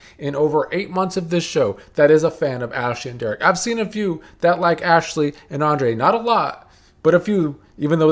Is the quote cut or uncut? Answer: uncut